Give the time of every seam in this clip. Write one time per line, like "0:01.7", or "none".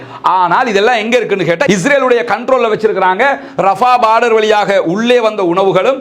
0:01.6